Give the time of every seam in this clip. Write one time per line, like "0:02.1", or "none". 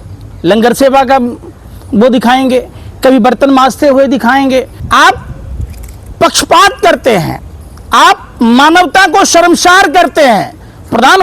0:04.7